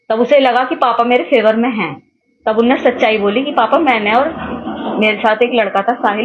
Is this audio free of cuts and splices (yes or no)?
yes